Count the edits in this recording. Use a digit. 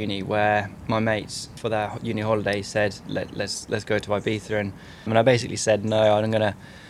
2